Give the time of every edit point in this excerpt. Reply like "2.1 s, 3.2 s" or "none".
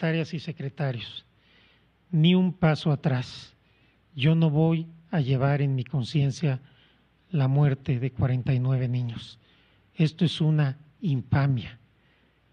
none

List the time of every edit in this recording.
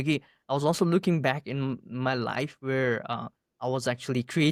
none

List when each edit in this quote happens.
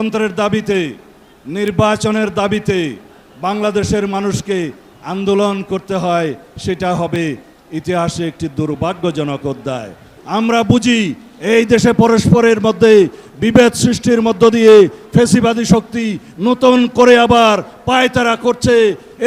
10.2 s

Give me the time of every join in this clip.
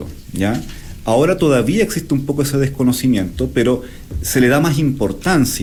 none

